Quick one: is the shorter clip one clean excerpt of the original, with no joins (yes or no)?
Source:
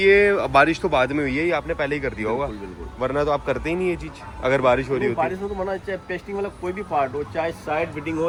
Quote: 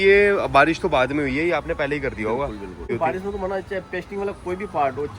no